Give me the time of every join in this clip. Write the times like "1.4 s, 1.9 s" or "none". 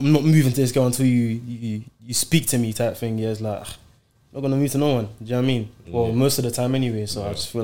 none